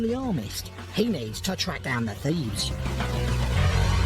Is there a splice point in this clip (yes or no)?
yes